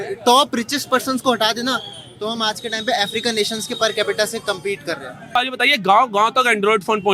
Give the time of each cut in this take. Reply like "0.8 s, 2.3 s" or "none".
5.4 s